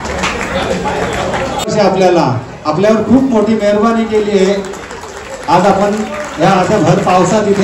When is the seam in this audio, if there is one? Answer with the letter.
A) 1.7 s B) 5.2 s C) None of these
A